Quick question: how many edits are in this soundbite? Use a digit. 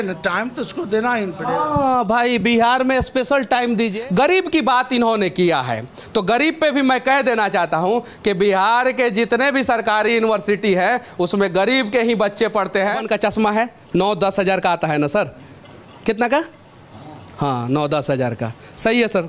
2